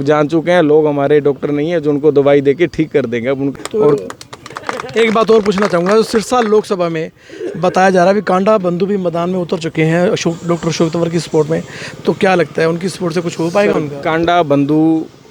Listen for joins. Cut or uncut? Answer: uncut